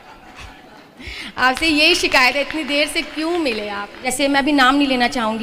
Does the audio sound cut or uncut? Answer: cut